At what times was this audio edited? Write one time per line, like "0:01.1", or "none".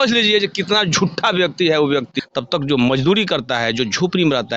0:02.1